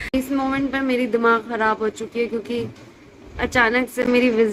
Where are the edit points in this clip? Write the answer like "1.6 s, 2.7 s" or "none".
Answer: none